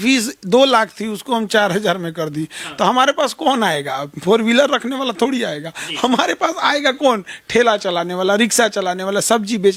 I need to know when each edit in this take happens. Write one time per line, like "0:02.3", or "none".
none